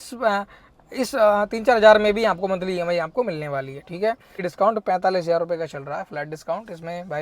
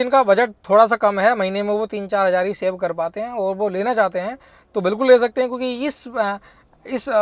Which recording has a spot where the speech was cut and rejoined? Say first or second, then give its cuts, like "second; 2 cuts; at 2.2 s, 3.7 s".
first; 1 cut; at 4.5 s